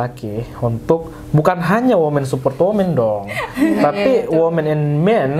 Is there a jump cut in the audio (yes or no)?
no